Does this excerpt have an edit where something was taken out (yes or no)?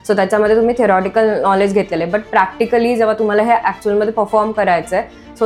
no